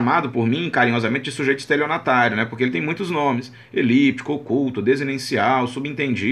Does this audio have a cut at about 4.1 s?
no; 1 cut; at 1.6 s

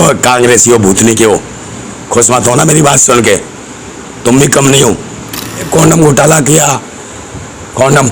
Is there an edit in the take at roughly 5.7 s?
yes; 1 cut; at 5.7 s

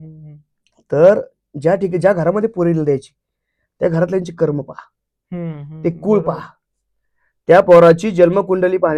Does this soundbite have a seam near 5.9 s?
no; 0 cuts

